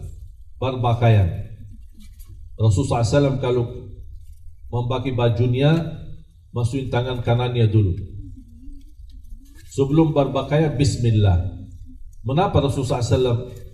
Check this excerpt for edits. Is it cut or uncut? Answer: uncut